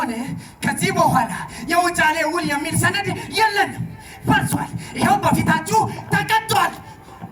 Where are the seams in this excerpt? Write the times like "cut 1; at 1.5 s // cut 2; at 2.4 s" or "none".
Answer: none